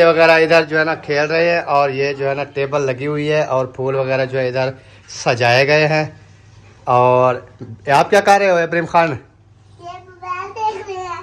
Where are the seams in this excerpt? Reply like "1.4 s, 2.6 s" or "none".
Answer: none